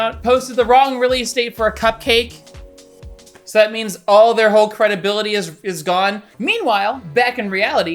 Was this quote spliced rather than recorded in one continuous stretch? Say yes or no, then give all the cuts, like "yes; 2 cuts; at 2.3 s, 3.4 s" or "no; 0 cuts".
yes; 1 cut; at 6.2 s